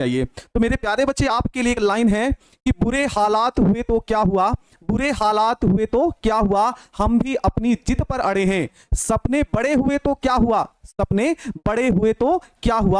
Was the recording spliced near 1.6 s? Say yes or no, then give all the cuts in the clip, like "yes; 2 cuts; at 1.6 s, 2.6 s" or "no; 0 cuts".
no; 1 cut; at 2.8 s